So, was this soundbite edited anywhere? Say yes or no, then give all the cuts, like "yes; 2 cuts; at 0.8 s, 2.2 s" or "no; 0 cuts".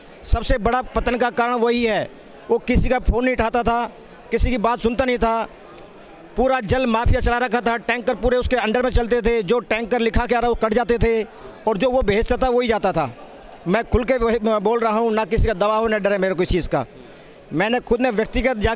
no; 0 cuts